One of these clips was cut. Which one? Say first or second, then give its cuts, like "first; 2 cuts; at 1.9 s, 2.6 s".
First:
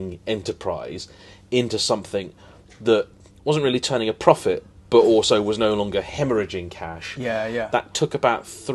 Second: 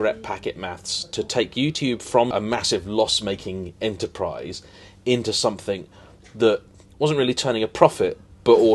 second; 1 cut; at 2.3 s